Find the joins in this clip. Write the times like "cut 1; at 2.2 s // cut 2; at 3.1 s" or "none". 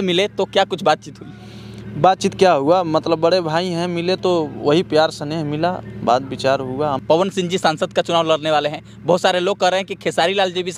cut 1; at 7.0 s